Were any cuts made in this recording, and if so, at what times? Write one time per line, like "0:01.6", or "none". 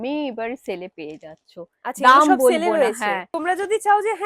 0:03.3